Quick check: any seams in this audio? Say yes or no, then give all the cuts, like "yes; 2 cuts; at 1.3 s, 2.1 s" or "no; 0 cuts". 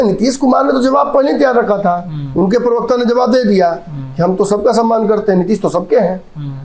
no; 0 cuts